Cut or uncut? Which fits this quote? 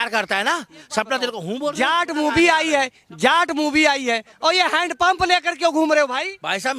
cut